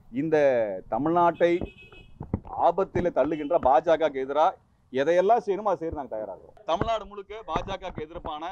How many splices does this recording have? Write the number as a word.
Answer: one